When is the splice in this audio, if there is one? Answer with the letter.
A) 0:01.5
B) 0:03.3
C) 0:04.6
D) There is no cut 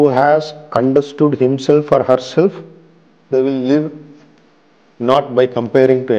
B